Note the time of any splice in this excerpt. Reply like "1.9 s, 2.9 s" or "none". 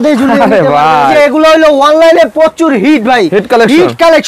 1.1 s

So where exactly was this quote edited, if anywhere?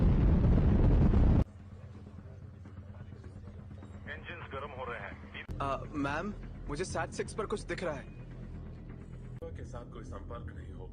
5.5 s

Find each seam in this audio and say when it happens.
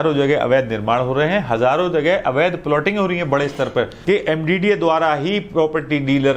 4.0 s

